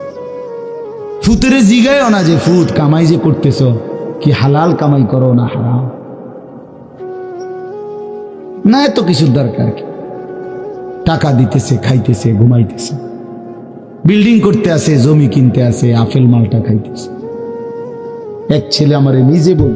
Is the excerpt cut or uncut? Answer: uncut